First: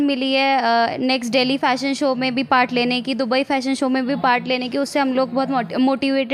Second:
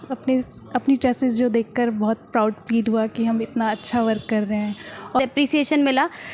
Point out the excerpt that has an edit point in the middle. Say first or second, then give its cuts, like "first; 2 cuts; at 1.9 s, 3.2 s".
second; 1 cut; at 5.2 s